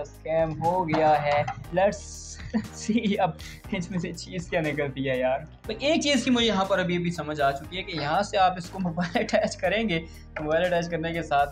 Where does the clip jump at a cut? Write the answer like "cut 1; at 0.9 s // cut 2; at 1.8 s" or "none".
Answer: cut 1; at 1.6 s // cut 2; at 5.6 s